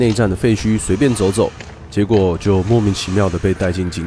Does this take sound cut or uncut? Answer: uncut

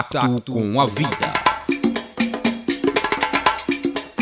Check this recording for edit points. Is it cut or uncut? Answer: cut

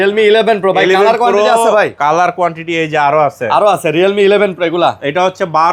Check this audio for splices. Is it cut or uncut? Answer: uncut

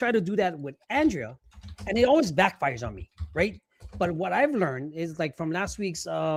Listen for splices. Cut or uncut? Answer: uncut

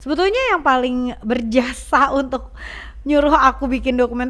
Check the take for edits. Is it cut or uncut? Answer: uncut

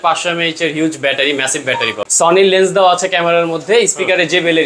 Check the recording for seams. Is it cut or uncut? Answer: cut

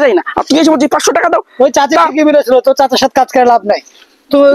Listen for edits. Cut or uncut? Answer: uncut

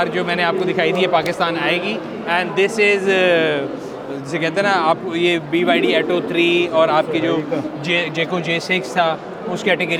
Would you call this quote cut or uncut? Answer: uncut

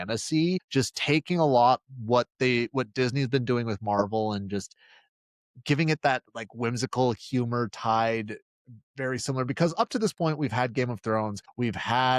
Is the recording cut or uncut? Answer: uncut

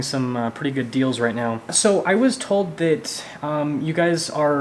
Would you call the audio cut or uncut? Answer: cut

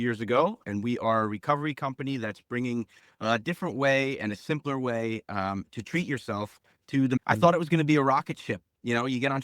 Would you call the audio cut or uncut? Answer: cut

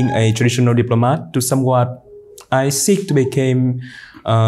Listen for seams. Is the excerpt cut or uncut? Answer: uncut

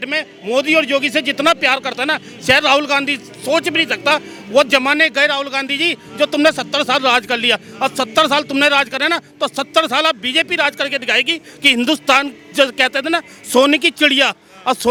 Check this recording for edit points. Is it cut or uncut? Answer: uncut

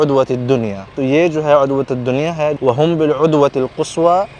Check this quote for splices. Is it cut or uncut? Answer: cut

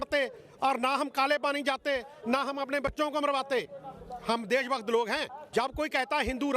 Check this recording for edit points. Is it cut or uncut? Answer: cut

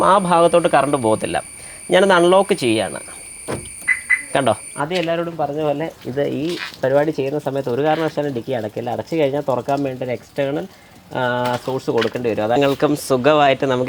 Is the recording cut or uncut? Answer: cut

